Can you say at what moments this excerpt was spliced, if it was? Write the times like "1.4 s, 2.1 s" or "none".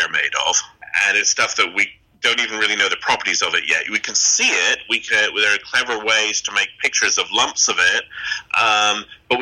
none